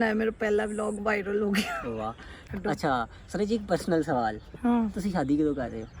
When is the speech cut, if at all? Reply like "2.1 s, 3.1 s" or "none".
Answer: 2.5 s

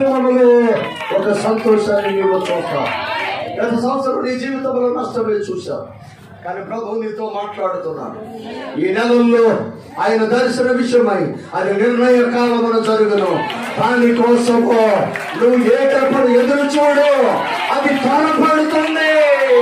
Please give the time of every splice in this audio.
3.3 s, 6.0 s, 8.5 s

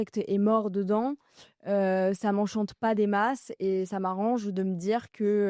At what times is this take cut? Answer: none

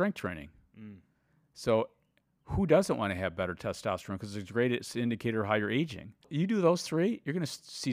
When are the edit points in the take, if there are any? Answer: 6.3 s

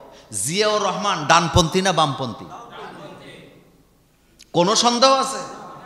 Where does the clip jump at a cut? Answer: none

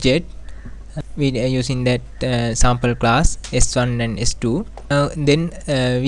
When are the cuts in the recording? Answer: 0.9 s, 4.9 s

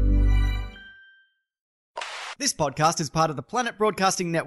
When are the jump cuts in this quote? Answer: 1.7 s

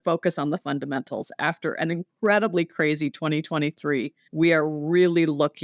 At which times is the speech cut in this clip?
2.1 s, 4.2 s

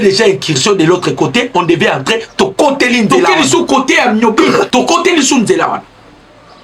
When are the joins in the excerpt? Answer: 3.4 s

